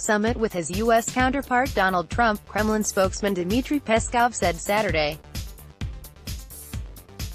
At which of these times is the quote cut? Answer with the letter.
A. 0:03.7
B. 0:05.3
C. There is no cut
B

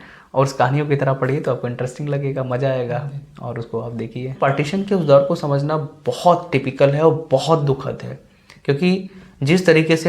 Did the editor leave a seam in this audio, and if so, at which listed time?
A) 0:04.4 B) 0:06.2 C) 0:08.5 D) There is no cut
A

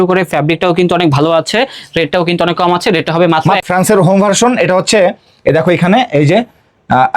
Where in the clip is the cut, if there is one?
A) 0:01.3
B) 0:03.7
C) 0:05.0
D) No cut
B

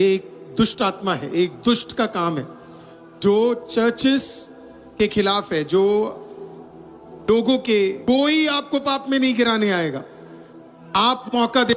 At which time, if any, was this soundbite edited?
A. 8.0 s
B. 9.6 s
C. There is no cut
A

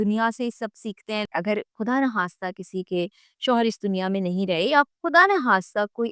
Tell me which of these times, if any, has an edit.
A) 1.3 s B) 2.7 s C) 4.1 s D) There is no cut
A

